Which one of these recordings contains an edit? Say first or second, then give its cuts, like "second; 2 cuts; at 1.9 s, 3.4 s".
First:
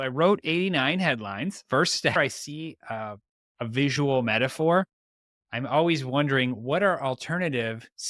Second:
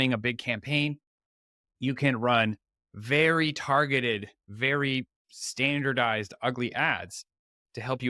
first; 1 cut; at 2.3 s